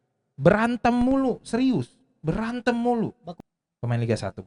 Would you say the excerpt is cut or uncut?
cut